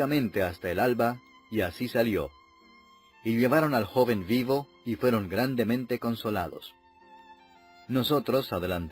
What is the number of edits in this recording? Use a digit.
1